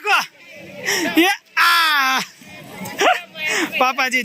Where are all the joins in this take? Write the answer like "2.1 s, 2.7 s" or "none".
none